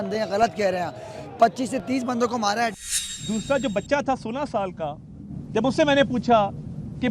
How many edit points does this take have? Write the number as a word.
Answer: one